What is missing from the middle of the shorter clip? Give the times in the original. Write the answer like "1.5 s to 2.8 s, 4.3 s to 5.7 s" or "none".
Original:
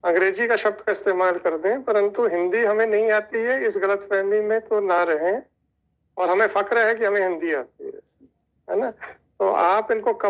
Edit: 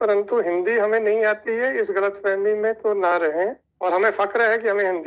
5.5 s to 6.0 s